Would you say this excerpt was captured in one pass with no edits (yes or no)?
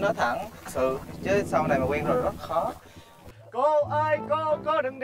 no